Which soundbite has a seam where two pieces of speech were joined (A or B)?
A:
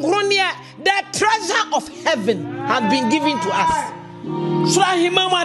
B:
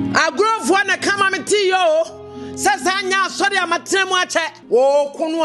B